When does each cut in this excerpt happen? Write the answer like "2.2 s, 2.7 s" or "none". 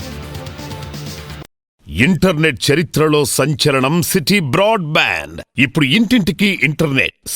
1.8 s